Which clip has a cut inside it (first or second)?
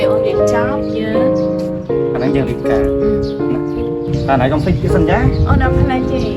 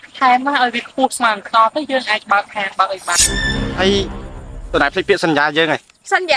second